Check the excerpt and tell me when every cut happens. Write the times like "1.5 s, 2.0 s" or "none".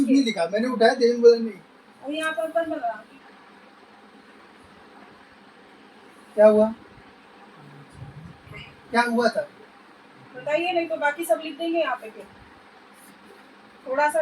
3.1 s